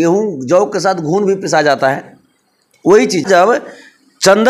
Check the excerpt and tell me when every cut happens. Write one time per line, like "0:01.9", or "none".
0:03.2